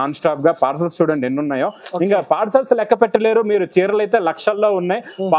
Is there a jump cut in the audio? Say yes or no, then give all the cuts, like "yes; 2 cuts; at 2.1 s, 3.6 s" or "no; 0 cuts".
no; 0 cuts